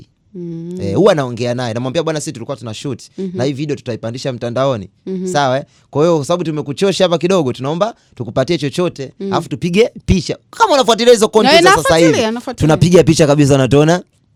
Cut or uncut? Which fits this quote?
uncut